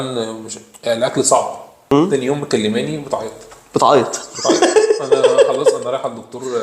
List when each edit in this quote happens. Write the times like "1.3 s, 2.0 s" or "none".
1.9 s